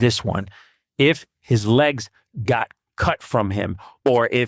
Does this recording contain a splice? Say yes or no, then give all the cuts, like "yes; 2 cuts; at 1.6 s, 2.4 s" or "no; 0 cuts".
no; 0 cuts